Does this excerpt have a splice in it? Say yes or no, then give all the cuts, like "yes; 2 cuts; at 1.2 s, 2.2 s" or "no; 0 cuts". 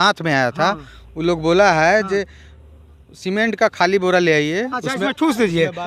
no; 0 cuts